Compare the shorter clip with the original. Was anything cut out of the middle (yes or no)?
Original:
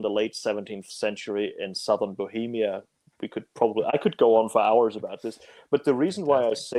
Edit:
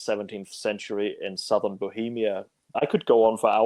yes